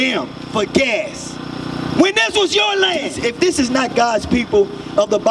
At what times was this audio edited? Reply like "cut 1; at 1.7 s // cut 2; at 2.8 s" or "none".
cut 1; at 3.2 s